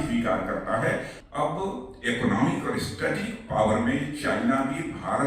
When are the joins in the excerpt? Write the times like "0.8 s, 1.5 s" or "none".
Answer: 1.2 s